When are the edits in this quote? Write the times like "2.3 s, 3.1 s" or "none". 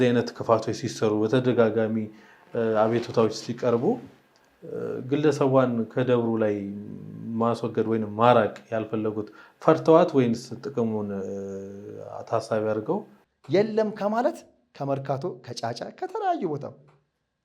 13.1 s

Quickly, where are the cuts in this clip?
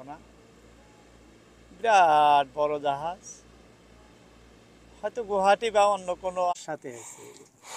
6.5 s

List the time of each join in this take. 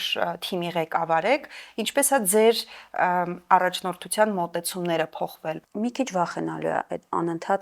5.6 s

